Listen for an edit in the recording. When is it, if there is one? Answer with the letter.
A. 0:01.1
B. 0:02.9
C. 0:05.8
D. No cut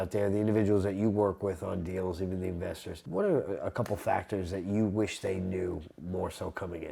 B